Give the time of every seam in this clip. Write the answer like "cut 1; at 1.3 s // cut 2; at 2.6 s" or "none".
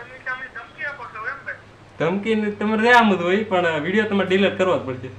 none